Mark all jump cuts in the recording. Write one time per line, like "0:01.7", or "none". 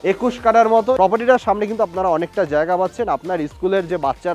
0:01.0